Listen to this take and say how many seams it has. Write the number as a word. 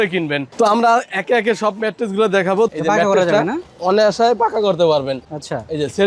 one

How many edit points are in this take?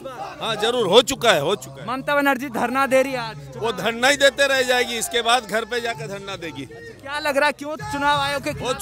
zero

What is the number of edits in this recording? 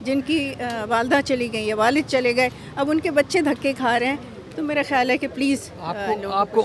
zero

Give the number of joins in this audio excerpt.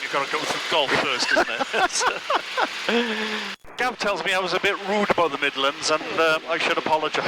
one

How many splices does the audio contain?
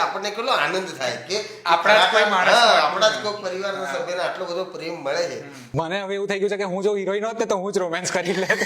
one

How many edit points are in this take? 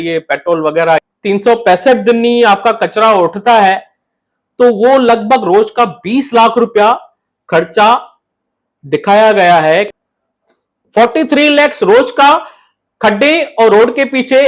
two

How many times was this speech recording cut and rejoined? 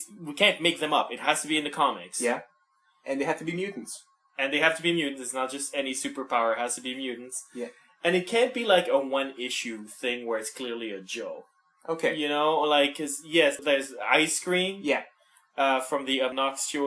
one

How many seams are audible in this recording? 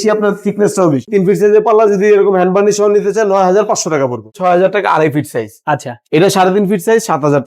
two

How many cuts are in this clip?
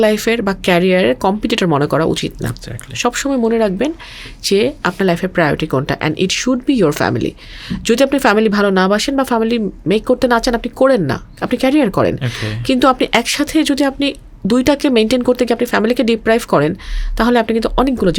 zero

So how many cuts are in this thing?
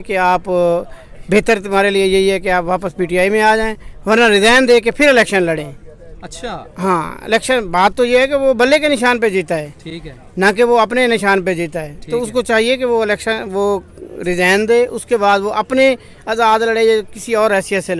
zero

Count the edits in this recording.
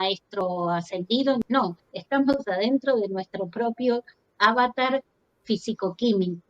one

